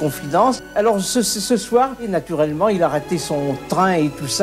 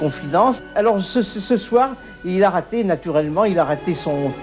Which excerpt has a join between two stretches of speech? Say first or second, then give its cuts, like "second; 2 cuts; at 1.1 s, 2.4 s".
first; 1 cut; at 2.0 s